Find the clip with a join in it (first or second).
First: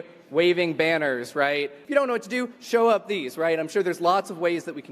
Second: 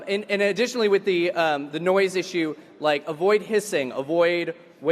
first